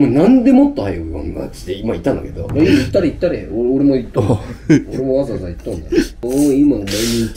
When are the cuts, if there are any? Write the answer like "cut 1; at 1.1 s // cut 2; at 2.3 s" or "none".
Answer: cut 1; at 2.4 s // cut 2; at 6.2 s